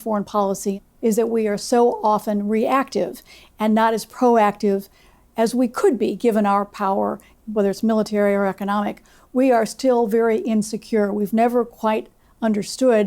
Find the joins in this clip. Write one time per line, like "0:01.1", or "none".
0:00.8
0:07.3